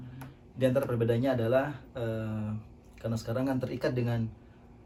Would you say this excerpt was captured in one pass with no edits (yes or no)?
yes